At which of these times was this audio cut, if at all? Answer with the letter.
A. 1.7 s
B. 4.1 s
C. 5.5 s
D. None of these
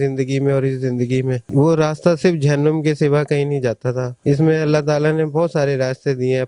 D